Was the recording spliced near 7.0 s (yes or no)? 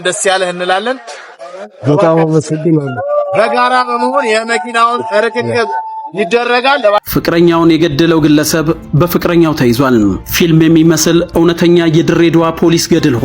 yes